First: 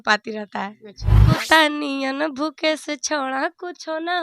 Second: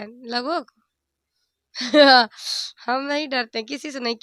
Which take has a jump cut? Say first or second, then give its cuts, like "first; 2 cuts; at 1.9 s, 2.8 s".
first; 1 cut; at 1.4 s